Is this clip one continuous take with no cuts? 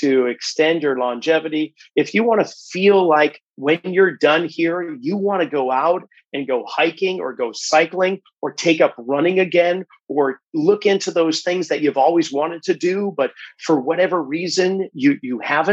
yes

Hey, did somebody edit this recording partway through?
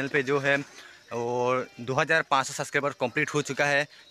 no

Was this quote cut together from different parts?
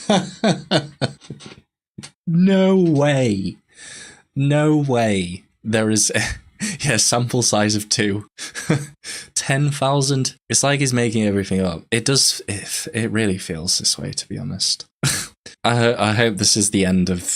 no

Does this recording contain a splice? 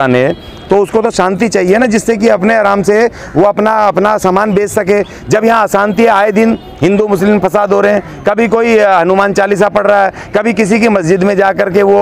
no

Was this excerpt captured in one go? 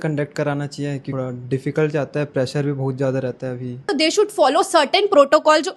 no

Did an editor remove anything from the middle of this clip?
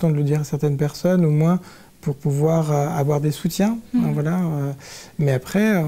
no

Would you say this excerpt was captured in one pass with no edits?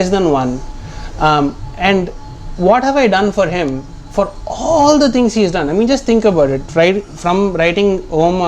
yes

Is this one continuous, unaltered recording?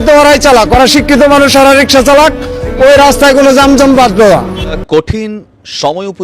no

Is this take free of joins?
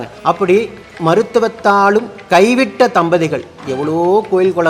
yes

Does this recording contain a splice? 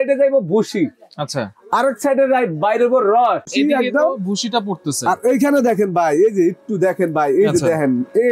yes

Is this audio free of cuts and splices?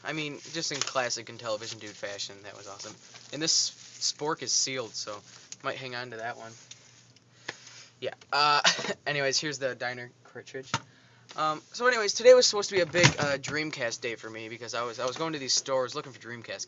yes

